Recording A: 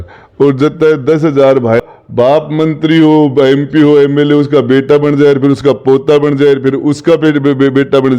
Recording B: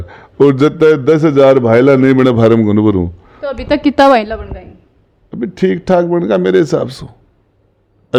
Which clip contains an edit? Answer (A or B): A